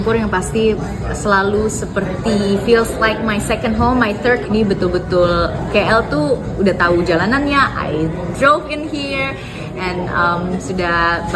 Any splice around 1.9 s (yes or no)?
no